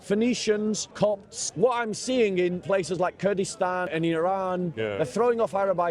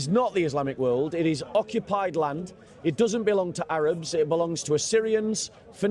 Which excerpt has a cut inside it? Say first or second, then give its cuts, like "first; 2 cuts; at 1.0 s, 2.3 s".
first; 4 cuts; at 1.2 s, 2.6 s, 3.9 s, 4.7 s